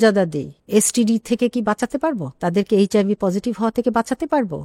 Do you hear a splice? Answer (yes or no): no